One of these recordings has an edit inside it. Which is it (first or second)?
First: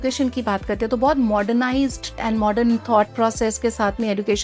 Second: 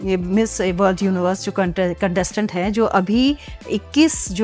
first